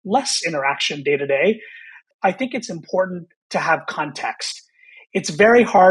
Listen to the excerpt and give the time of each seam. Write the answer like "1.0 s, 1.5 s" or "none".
2.1 s